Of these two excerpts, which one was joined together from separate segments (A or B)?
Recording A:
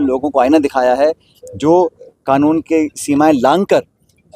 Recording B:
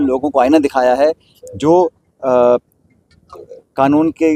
A